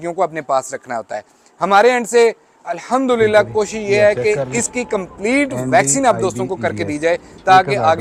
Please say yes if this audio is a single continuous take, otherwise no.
yes